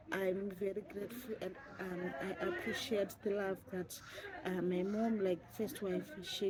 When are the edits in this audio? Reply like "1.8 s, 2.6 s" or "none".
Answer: none